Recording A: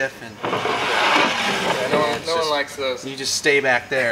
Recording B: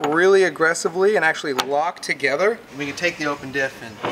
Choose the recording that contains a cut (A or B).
B